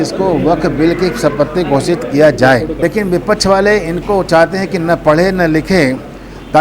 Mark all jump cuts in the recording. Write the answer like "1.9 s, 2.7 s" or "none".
2.8 s